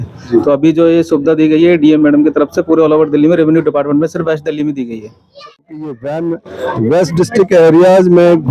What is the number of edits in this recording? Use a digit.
1